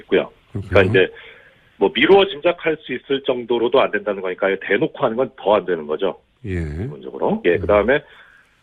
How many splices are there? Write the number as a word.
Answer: one